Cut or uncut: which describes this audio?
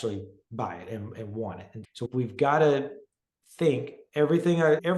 uncut